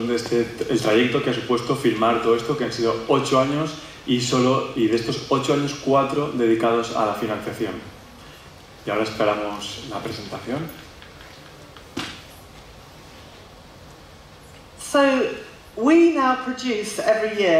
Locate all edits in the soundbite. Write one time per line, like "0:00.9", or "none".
0:01.2